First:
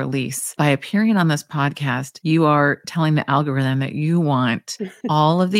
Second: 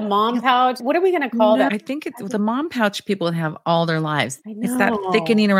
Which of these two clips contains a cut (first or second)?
second